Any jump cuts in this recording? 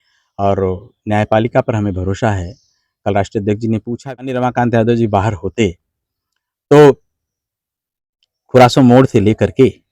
yes; 1 cut; at 3.9 s

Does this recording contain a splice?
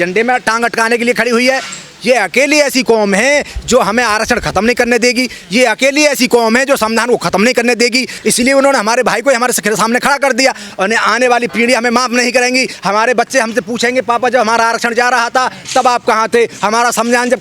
yes; 2 cuts; at 8.2 s, 10.7 s

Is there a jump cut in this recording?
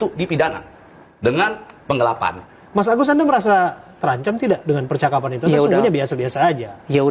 yes; 1 cut; at 2.4 s

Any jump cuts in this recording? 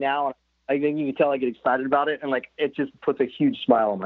no; 0 cuts

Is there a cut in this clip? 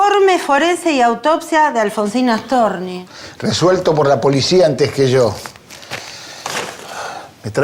no; 0 cuts

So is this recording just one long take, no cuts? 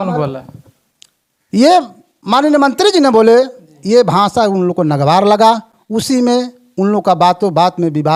yes; 0 cuts

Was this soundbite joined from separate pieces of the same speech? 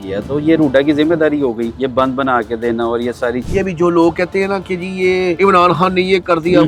yes; 3 cuts; at 1.7 s, 3.4 s, 5.4 s

